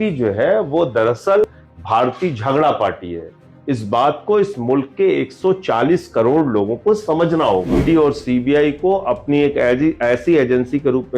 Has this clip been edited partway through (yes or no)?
yes